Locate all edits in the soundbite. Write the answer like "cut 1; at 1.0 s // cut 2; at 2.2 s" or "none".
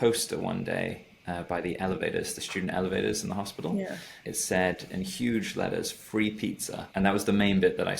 none